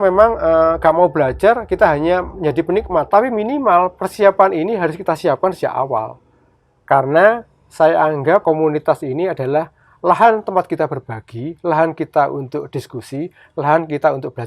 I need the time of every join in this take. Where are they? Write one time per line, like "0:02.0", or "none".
0:03.1
0:08.4